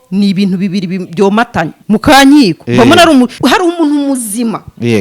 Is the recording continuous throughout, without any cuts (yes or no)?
no